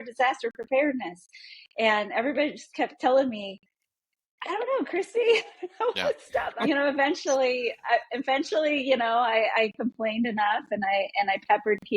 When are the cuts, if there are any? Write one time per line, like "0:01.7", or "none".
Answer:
0:06.5